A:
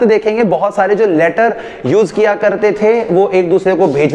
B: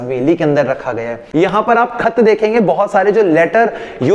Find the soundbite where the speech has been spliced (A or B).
B